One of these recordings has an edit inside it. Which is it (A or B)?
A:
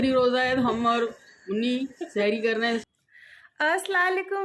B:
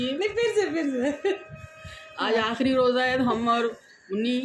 A